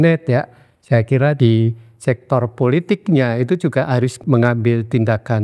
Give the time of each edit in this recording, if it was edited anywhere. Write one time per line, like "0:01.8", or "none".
0:01.4
0:04.2